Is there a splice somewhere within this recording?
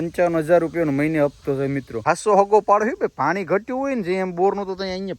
yes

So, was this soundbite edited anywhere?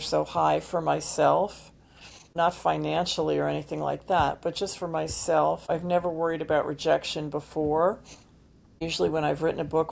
no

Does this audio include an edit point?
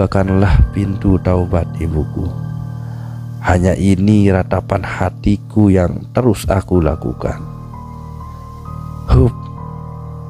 no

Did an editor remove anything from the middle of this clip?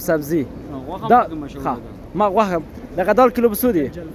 no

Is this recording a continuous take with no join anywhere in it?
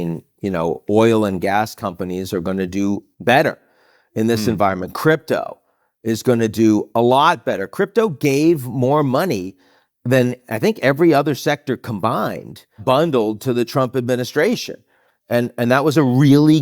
yes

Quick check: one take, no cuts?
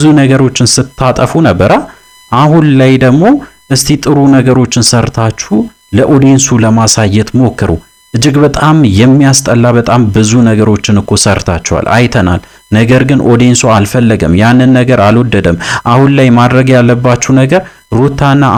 yes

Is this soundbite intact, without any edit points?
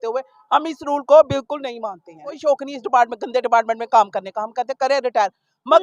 no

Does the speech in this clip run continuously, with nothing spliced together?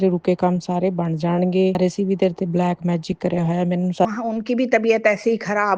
no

